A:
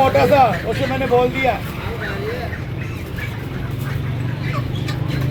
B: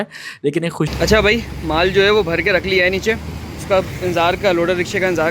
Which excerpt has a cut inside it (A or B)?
B